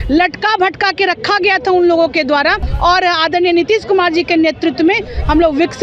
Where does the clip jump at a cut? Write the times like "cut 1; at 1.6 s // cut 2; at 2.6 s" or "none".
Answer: cut 1; at 2.6 s